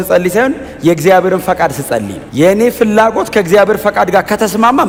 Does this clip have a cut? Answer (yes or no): no